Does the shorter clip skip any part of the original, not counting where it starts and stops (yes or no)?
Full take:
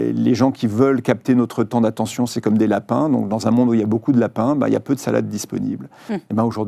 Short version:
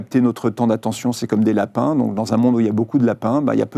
no